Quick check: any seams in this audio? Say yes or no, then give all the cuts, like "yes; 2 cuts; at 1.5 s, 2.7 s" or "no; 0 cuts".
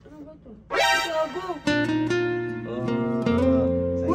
no; 0 cuts